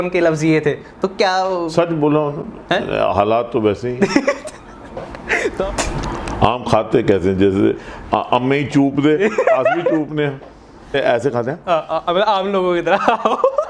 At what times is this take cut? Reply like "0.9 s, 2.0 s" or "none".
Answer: 5.7 s, 11.0 s